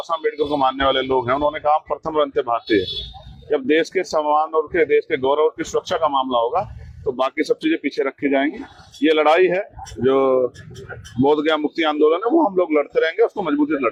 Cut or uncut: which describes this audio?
uncut